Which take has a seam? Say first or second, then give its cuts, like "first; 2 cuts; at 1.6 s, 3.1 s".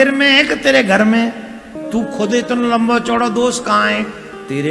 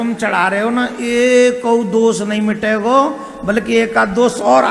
first; 1 cut; at 1.7 s